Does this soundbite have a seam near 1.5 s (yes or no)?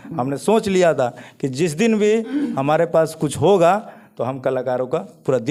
no